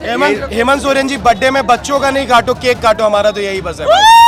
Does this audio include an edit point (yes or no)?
no